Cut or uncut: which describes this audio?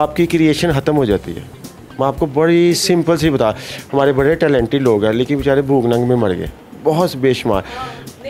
uncut